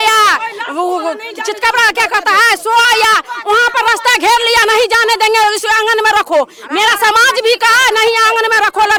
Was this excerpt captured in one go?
yes; 0 cuts

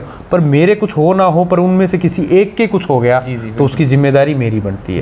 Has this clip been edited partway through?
no; 0 cuts

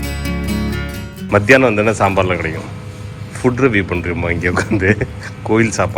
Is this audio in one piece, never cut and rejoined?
no; 1 cut; at 1.0 s

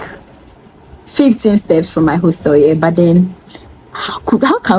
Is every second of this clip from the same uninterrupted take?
yes; 0 cuts

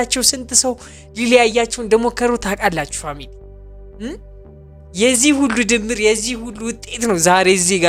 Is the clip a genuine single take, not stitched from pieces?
yes; 0 cuts

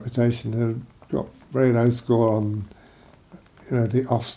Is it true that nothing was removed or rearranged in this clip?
yes; 0 cuts

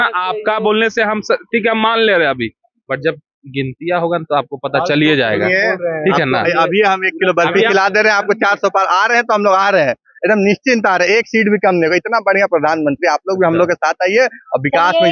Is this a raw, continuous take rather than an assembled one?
yes; 0 cuts

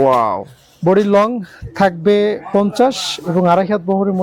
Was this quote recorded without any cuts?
yes; 0 cuts

